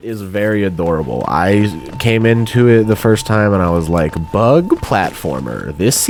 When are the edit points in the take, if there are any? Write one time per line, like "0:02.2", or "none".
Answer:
none